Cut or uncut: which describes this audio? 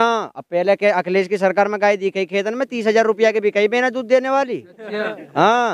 uncut